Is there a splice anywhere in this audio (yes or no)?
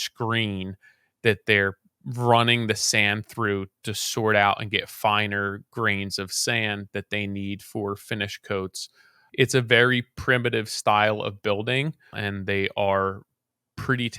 yes